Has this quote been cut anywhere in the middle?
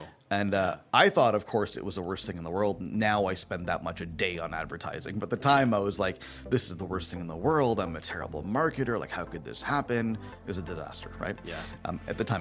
no; 0 cuts

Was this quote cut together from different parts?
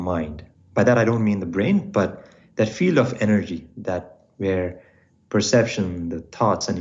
no; 0 cuts

